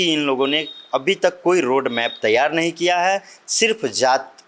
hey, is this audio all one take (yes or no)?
yes